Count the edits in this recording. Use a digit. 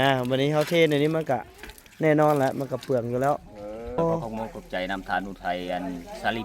1